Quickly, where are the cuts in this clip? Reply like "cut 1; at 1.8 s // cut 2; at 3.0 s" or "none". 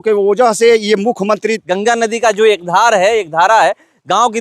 cut 1; at 1.7 s